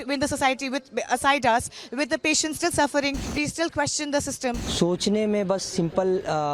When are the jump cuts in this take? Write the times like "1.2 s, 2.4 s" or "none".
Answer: 3.2 s, 4.6 s